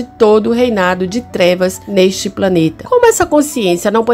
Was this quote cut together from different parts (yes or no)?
yes